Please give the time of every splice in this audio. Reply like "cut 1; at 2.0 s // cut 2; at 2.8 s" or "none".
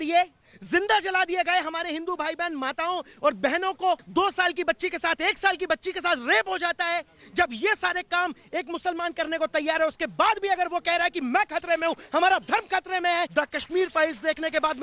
cut 1; at 4.0 s // cut 2; at 13.3 s

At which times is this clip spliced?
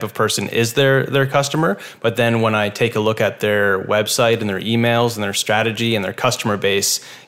none

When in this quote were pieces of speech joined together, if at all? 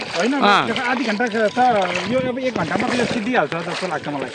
none

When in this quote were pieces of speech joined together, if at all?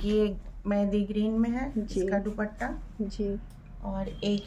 none

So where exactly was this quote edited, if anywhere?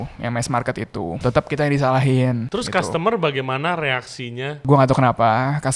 cut 1; at 1.2 s // cut 2; at 2.4 s // cut 3; at 4.6 s

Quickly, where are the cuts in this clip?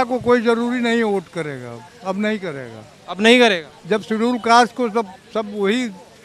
none

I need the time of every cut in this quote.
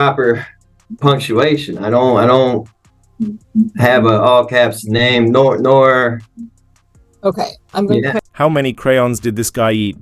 none

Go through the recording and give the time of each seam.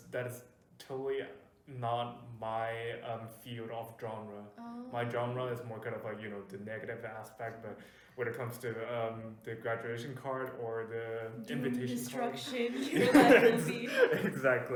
none

